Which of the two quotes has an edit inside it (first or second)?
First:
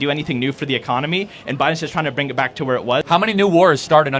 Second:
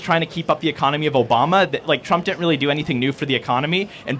first